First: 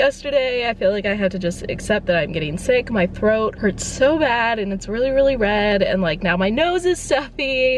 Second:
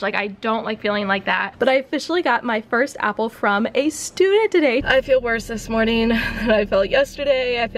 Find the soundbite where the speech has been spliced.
second; 2 cuts; at 1.5 s, 4.8 s

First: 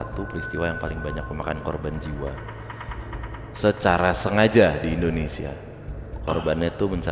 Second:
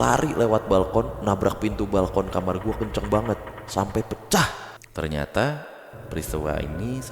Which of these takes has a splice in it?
second; 1 cut; at 4.7 s

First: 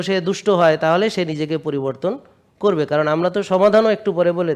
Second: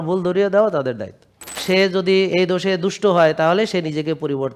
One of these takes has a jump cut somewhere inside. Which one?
second; 1 cut; at 1.6 s

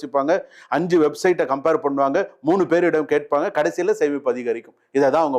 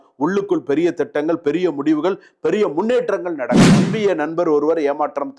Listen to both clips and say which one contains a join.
second; 1 cut; at 3.7 s

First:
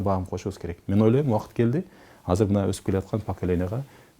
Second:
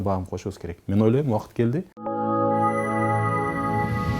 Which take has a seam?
second; 1 cut; at 2.0 s

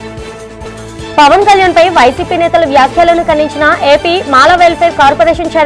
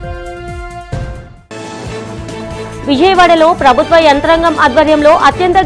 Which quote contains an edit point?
second; 1 cut; at 1.0 s

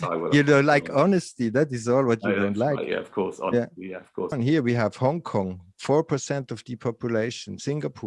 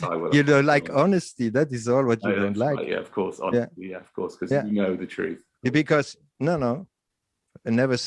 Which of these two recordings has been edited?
first; 1 cut; at 4.3 s

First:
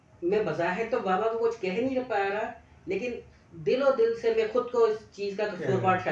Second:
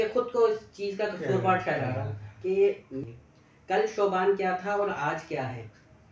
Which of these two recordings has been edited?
second; 1 cut; at 2.9 s

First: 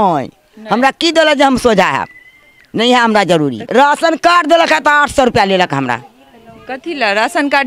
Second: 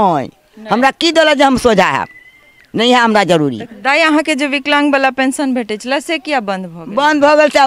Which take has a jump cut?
first; 1 cut; at 3.6 s

